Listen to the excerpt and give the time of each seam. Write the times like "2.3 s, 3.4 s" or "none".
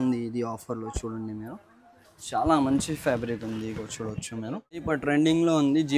4.8 s

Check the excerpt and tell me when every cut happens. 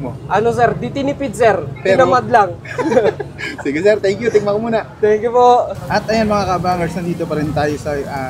none

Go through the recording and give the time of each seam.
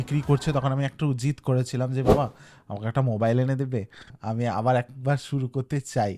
4.2 s

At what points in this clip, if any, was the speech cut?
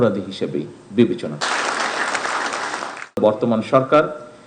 3.2 s

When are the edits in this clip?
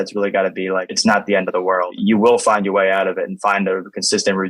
0.9 s, 1.9 s

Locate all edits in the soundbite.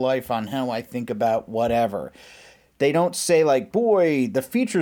2.6 s

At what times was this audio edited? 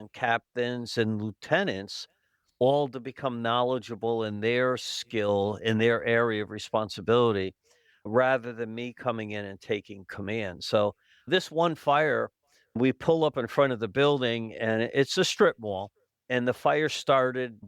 12.8 s

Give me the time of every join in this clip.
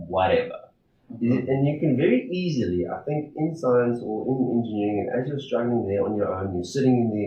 none

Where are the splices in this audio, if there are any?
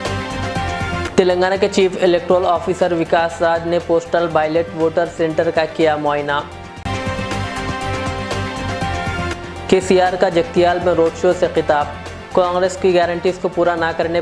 1.0 s

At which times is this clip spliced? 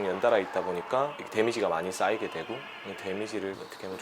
1.2 s

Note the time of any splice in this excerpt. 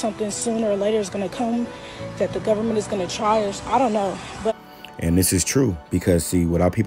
none

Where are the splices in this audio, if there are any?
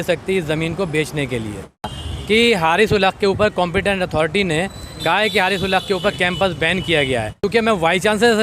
2.0 s, 7.4 s

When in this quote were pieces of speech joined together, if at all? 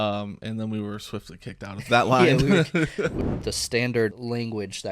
3.1 s, 4.2 s

